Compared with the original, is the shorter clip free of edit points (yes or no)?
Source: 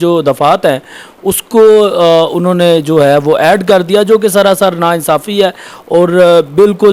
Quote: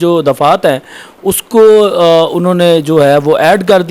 yes